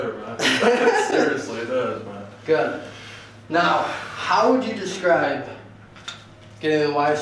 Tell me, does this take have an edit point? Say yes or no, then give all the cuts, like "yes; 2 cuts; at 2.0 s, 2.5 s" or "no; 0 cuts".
no; 0 cuts